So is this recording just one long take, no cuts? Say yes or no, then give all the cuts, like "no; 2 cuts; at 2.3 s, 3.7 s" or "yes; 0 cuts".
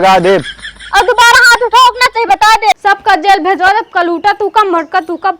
no; 1 cut; at 2.7 s